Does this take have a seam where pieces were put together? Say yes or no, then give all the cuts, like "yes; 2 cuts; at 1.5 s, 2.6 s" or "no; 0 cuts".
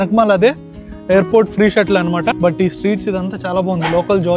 yes; 1 cut; at 2.4 s